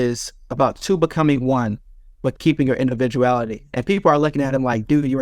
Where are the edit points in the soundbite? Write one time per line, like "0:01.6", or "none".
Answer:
none